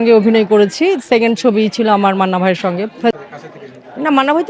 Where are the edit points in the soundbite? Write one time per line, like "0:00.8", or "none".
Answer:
0:03.2